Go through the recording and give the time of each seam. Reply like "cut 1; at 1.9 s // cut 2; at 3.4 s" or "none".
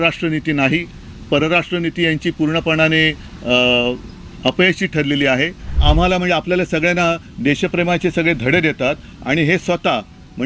cut 1; at 5.7 s